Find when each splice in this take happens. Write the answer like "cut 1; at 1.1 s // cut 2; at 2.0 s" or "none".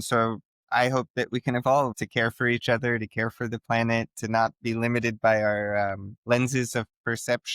cut 1; at 2.0 s // cut 2; at 6.1 s